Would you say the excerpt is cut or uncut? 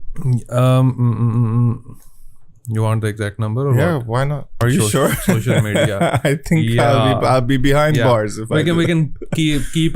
cut